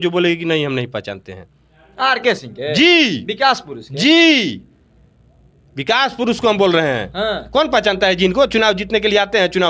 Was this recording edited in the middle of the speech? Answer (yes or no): no